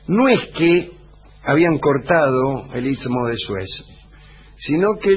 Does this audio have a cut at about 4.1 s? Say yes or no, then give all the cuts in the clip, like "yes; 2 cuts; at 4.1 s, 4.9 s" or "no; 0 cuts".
yes; 1 cut; at 4.1 s